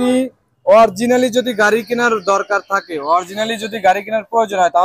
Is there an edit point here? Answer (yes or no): no